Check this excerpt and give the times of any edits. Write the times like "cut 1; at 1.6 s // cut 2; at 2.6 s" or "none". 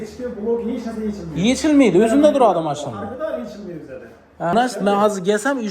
cut 1; at 4.5 s